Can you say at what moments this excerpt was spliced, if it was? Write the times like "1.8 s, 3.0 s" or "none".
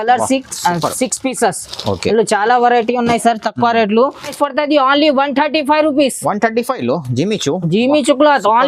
4.3 s